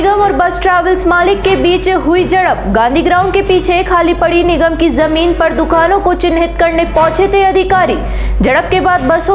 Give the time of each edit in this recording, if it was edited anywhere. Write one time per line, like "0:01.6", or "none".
none